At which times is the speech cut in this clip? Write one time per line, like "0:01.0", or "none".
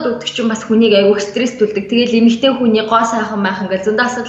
none